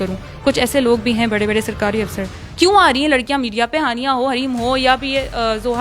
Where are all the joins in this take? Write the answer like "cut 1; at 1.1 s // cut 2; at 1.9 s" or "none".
cut 1; at 2.4 s